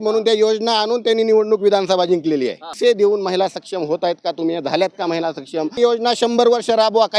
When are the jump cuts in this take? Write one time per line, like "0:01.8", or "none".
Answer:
0:02.8
0:05.8